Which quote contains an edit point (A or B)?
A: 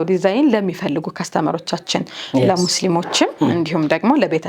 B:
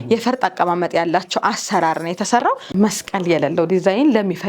B